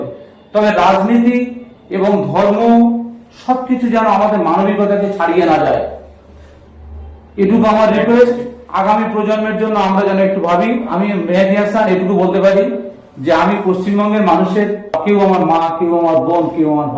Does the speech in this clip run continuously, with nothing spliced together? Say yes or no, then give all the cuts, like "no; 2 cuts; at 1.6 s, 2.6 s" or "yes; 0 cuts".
no; 2 cuts; at 10.9 s, 15.0 s